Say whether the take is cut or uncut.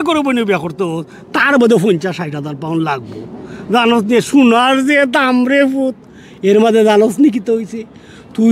uncut